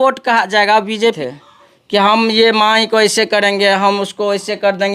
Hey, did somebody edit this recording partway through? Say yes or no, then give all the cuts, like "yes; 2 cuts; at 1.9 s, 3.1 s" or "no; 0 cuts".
yes; 1 cut; at 1.2 s